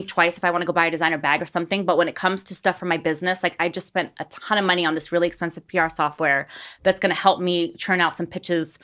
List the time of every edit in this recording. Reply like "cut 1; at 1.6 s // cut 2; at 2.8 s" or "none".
none